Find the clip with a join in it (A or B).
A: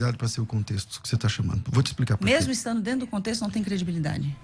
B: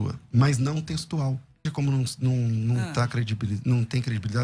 B